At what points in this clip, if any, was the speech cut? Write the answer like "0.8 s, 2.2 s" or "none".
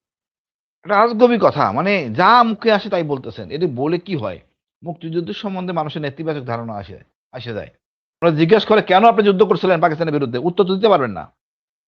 8.1 s